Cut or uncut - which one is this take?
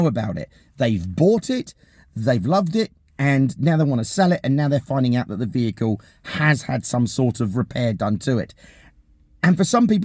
uncut